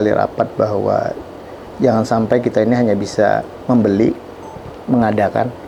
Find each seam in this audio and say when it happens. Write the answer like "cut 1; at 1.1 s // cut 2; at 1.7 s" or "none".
none